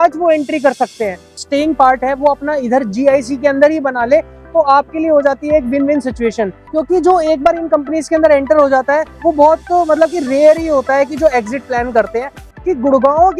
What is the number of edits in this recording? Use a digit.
3